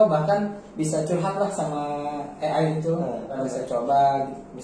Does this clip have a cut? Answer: yes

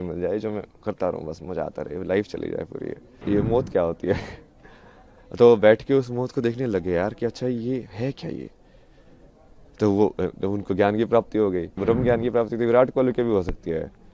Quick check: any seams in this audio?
yes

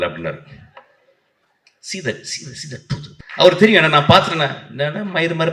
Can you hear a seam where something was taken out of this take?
yes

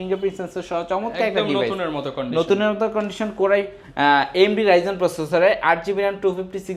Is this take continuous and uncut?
yes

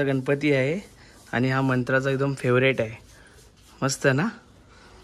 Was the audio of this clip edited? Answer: no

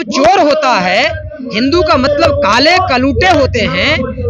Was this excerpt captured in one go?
yes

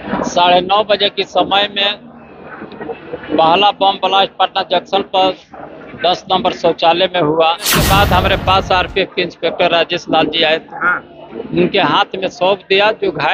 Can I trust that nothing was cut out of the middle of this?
no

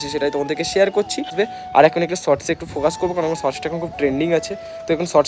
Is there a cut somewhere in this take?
yes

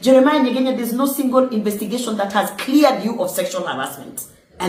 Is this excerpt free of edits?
yes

